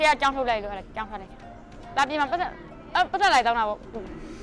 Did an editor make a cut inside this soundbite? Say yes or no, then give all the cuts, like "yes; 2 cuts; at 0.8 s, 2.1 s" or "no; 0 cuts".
yes; 1 cut; at 1.7 s